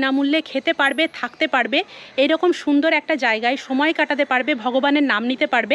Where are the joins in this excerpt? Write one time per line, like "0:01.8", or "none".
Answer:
none